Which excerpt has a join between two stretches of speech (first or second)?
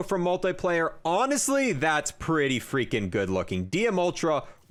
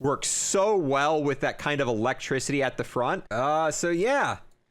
second